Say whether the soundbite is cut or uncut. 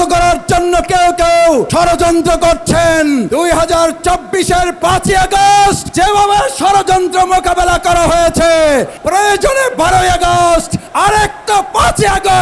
cut